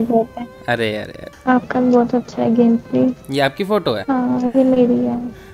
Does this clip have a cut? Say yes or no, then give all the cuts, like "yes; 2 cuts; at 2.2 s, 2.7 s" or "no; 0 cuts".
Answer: yes; 2 cuts; at 1.2 s, 4.0 s